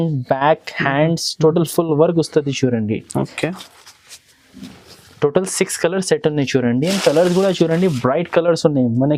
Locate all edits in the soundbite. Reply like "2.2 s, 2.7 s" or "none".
none